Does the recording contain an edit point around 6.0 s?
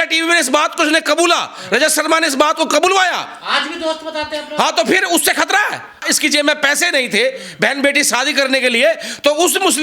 yes; 1 cut; at 6.0 s

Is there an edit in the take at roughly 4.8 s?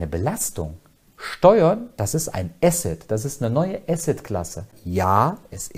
yes; 1 cut; at 4.8 s

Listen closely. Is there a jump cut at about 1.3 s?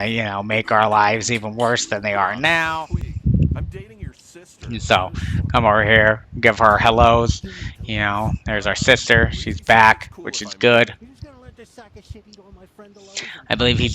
no; 1 cut; at 2.7 s

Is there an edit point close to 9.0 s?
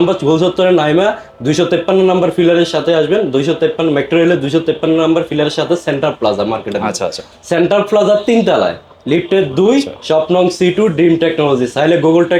no; 0 cuts

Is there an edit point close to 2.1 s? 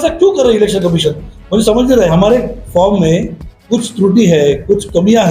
yes; 1 cut; at 2.1 s

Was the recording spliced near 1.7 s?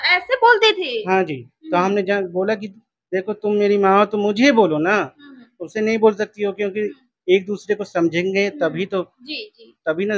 no; 0 cuts

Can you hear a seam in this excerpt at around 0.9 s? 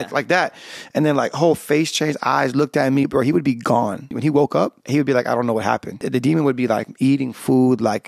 no; 4 cuts; at 3.1 s, 4.1 s, 4.8 s, 6.1 s

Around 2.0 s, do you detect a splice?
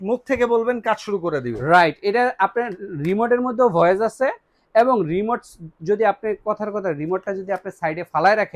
no; 0 cuts

